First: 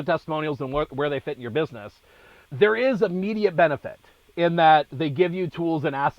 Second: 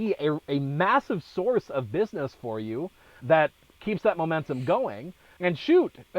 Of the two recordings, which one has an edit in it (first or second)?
second